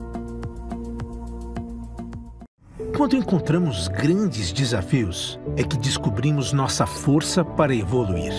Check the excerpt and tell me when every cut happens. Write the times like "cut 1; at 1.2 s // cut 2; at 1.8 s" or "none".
cut 1; at 2.4 s